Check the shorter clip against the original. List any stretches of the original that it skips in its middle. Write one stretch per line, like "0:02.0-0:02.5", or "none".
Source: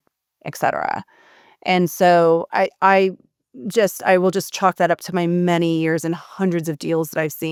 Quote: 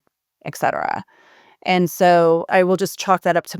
0:02.4-0:04.0

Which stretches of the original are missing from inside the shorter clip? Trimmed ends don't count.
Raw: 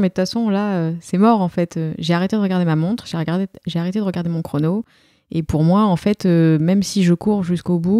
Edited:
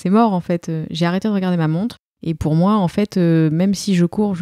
0:03.1-0:05.1

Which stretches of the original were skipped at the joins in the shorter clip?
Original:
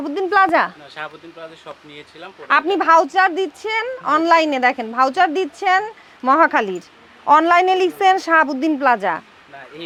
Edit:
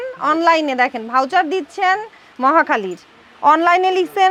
none

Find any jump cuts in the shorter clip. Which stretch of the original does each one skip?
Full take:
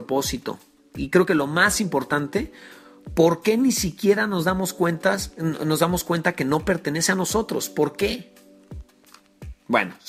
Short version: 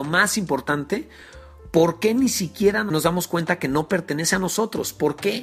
0:04.3-0:05.6

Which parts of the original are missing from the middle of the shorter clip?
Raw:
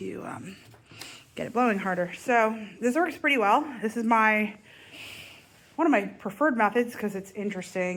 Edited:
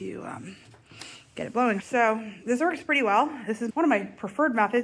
0:01.8-0:02.2
0:04.0-0:05.7

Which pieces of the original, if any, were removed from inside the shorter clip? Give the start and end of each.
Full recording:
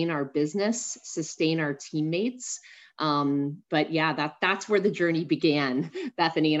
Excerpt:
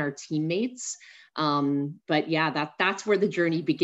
none

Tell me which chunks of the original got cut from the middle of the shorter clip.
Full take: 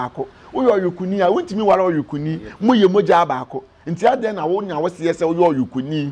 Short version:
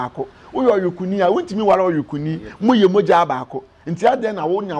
none

